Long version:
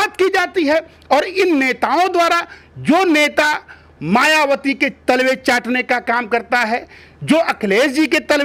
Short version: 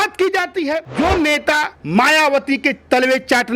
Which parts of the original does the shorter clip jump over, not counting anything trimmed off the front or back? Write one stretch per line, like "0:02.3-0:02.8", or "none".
0:00.8-0:02.7
0:03.7-0:03.9